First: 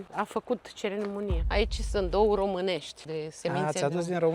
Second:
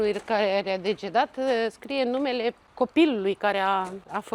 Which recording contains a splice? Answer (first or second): first